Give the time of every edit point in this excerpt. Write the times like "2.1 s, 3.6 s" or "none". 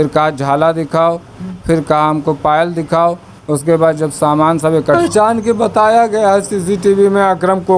5.0 s